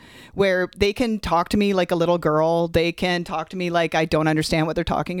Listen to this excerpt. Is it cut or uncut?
uncut